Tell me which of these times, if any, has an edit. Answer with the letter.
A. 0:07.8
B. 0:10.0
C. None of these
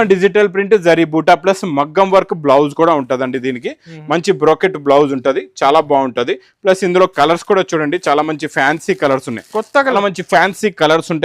B